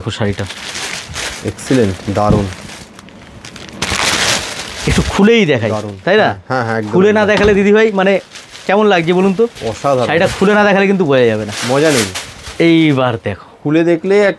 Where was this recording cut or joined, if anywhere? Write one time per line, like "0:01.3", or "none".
none